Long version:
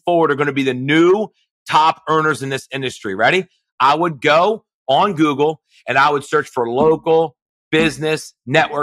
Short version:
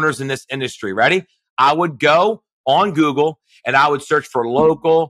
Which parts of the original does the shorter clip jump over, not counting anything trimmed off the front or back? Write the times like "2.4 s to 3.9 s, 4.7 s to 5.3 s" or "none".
none